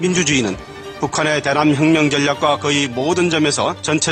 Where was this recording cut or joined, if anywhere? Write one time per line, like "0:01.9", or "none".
none